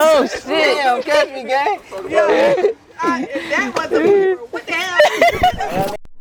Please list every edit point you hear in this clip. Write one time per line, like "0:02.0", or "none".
none